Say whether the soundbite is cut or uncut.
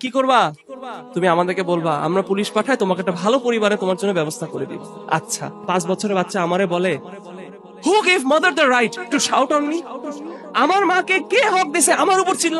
cut